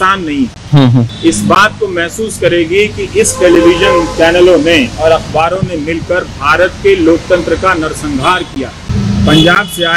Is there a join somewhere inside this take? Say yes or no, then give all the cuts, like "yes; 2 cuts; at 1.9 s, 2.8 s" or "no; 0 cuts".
yes; 2 cuts; at 1.1 s, 8.9 s